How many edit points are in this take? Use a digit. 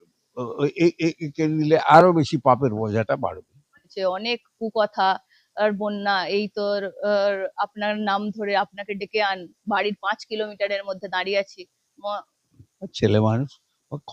1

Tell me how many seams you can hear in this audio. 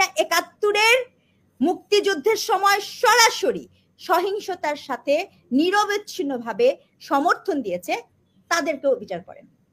0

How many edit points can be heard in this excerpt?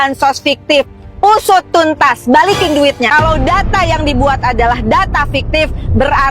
1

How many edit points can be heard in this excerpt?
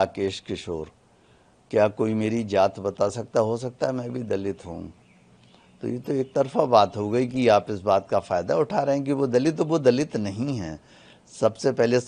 0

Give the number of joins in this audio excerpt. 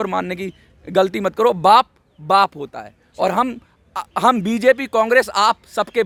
0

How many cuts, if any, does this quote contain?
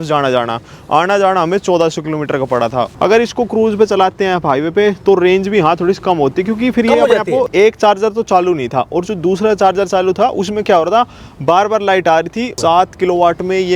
3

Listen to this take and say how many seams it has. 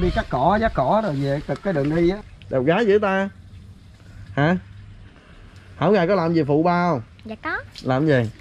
1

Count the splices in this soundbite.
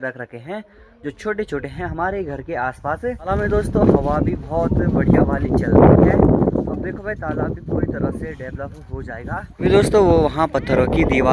2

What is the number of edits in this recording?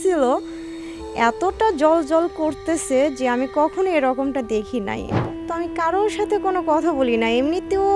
1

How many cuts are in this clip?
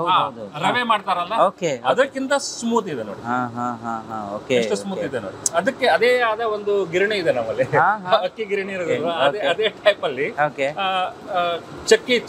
0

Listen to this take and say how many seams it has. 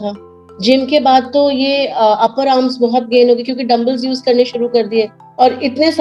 0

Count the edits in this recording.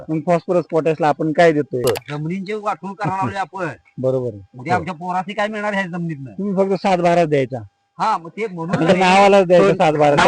1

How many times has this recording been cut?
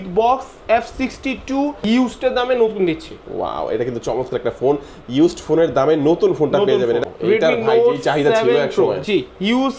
2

